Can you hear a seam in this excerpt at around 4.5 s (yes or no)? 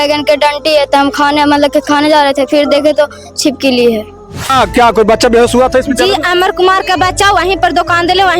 yes